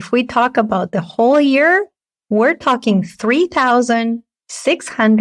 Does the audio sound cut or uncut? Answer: uncut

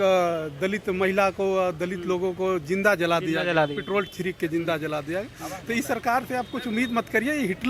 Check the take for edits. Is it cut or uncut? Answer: uncut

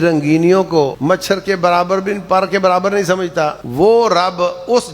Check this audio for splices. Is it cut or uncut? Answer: cut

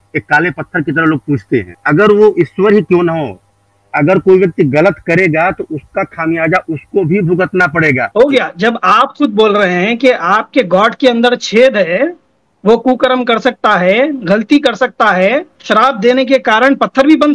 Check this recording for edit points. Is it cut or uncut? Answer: cut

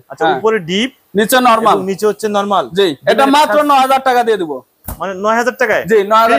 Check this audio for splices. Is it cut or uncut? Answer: uncut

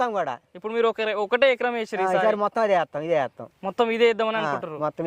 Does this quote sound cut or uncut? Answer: uncut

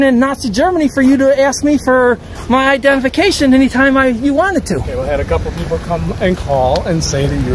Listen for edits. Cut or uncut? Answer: uncut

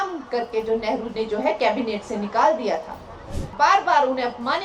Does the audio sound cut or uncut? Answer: cut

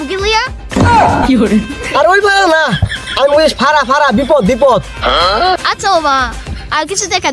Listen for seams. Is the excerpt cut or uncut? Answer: uncut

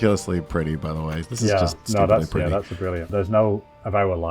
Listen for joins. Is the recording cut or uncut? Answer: cut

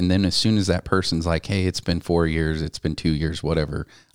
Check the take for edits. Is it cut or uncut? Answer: uncut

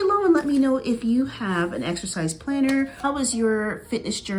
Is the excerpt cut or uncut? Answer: cut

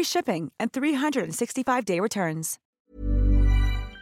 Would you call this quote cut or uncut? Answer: cut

